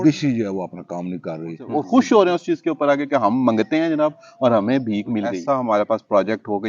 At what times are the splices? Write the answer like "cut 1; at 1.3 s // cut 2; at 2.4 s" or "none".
cut 1; at 1.6 s // cut 2; at 5.4 s

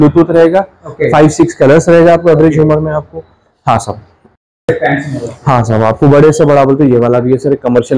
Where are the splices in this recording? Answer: none

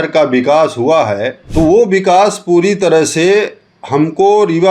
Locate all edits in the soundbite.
cut 1; at 1.4 s

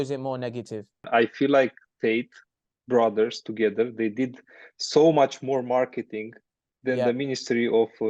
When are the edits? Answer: cut 1; at 1.0 s

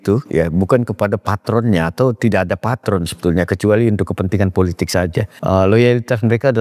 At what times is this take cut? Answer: cut 1; at 5.3 s

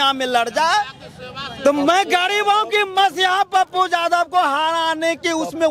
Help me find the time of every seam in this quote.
none

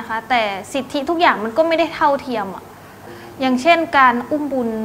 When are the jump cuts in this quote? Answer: none

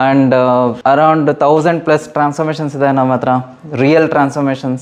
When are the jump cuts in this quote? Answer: none

